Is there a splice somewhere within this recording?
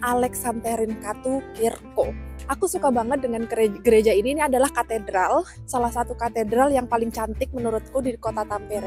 yes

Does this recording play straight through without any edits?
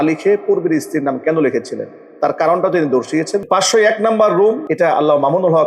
no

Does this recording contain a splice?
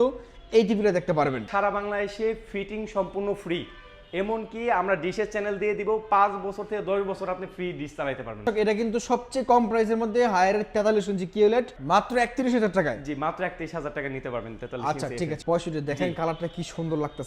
yes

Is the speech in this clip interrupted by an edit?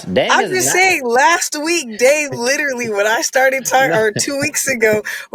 no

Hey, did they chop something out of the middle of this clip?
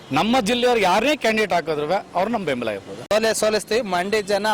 yes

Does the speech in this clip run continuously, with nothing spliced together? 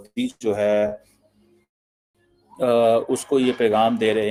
yes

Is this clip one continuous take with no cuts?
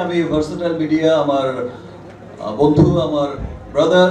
yes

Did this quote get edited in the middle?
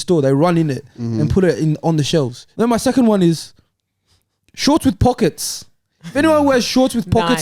yes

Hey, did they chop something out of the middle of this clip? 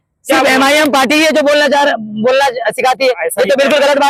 no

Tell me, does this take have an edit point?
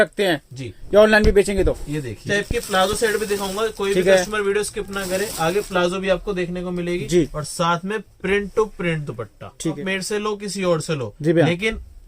yes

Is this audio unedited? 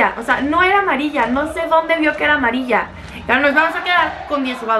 yes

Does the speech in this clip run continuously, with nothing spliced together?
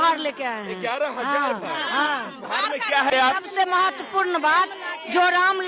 no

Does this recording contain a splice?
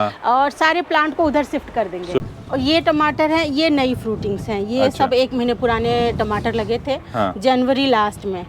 yes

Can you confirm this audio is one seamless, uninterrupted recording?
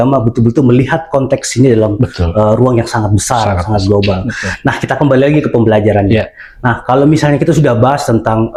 yes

